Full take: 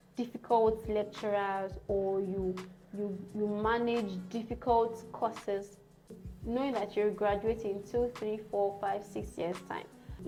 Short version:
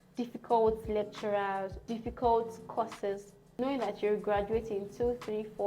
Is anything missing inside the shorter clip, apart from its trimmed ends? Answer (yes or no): yes